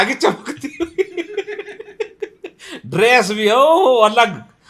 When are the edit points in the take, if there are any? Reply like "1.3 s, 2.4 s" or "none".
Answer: none